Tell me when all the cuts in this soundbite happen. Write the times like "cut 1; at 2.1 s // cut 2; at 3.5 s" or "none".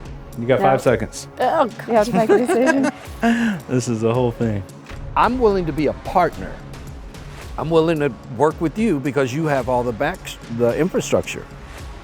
cut 1; at 4.7 s

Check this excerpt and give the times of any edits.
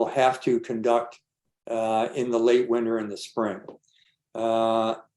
none

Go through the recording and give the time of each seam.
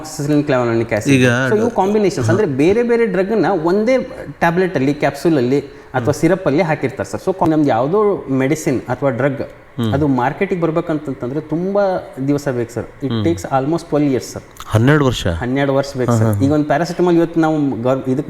cut 1; at 7.5 s

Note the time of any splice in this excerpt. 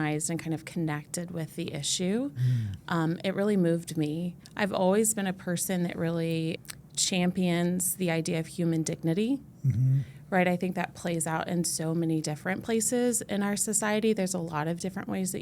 cut 1; at 6.6 s

